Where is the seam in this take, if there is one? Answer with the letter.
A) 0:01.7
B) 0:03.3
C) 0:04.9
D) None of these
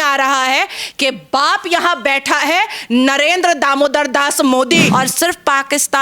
C